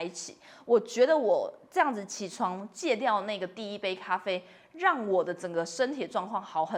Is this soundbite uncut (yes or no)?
yes